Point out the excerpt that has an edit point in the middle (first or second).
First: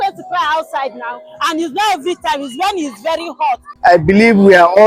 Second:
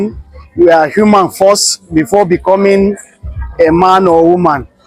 first